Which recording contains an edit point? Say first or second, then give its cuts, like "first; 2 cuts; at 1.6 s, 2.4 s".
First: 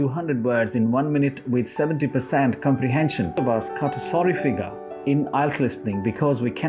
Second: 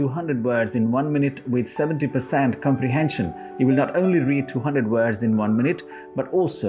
first; 1 cut; at 3.4 s